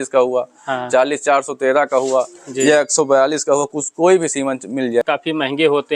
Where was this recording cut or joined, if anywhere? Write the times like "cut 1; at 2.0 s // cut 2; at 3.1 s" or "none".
cut 1; at 5.0 s

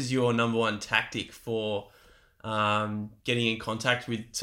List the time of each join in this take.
none

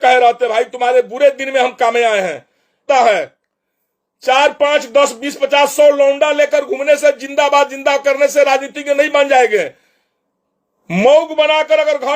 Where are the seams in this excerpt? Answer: cut 1; at 2.9 s

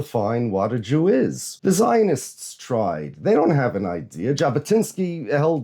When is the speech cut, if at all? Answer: cut 1; at 1.5 s

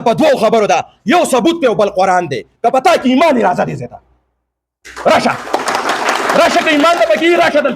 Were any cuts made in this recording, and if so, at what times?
cut 1; at 6.8 s

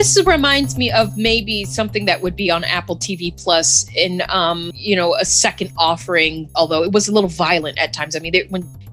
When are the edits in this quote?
cut 1; at 6.4 s

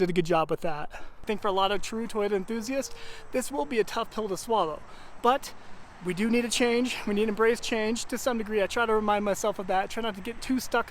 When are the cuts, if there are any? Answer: cut 1; at 1.2 s

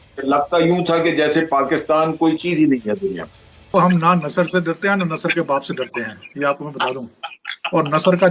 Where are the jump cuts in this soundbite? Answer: cut 1; at 3.7 s

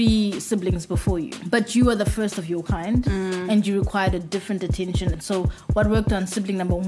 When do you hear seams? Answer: cut 1; at 1.3 s // cut 2; at 5.2 s

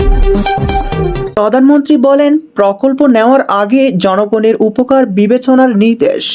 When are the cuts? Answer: cut 1; at 1.4 s

